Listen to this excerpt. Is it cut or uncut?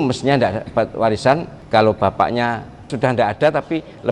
cut